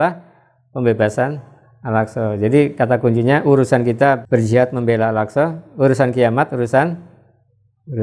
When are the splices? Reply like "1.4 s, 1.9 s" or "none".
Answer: 4.2 s

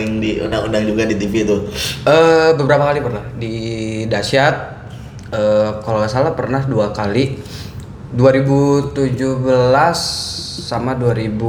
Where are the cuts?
none

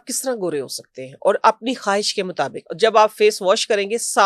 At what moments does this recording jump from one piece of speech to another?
2.6 s

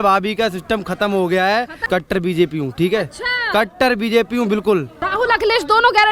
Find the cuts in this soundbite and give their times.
1.8 s, 5.0 s

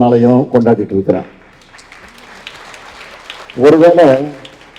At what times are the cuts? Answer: 3.5 s

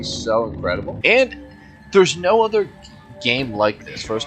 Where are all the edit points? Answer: 0.9 s

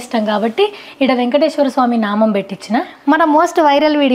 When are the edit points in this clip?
2.9 s

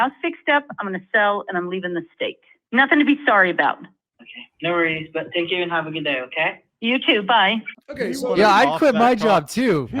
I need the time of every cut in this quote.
2.5 s, 7.8 s

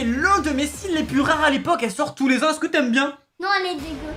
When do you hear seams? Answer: none

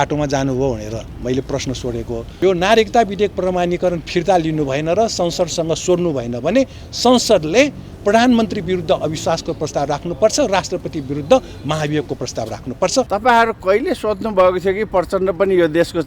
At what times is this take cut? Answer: 2.2 s, 13.1 s

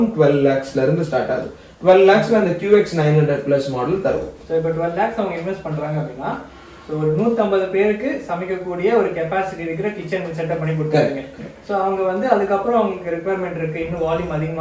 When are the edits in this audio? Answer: none

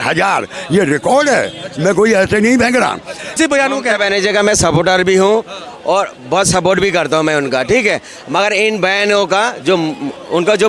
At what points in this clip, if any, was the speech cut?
3.4 s

